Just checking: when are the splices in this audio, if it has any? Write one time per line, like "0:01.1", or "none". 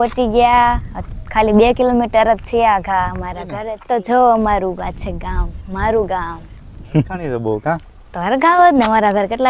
0:03.7
0:07.3